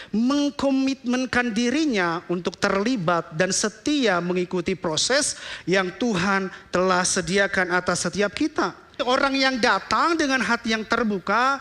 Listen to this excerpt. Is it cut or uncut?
cut